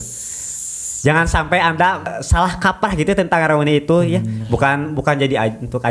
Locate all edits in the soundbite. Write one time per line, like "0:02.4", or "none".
0:02.1